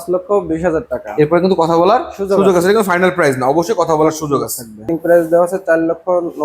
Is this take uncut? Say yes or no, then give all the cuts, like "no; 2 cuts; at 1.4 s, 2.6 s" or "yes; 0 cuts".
no; 1 cut; at 4.8 s